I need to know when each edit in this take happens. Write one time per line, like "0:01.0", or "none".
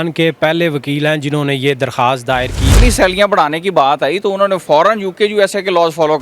0:02.7